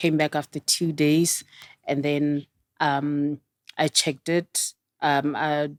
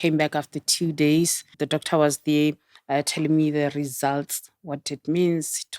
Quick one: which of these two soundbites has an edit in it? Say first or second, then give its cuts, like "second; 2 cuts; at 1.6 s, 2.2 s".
second; 2 cuts; at 1.6 s, 2.7 s